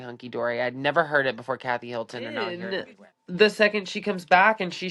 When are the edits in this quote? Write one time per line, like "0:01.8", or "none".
0:02.6